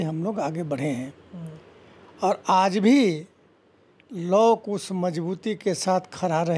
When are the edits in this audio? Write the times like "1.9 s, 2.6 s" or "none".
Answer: none